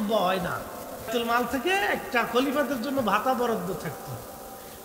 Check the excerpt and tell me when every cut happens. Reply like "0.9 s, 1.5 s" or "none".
1.1 s